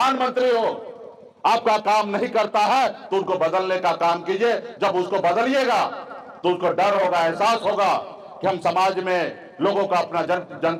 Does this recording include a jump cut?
no; 0 cuts

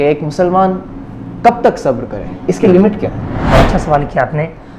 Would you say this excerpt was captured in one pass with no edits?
no; 1 cut; at 3.3 s

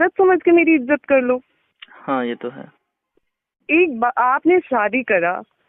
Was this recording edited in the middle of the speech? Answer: no; 0 cuts

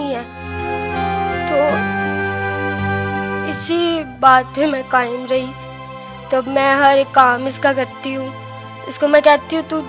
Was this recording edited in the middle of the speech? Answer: no; 0 cuts

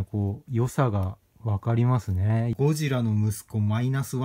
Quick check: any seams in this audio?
yes; 1 cut; at 2.5 s

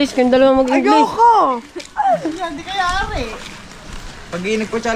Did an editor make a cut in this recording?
no; 0 cuts

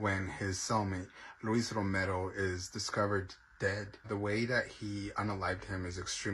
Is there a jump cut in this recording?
yes; 1 cut; at 4.1 s

